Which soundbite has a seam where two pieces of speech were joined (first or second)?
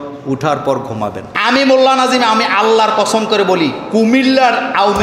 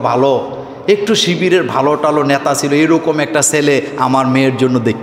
first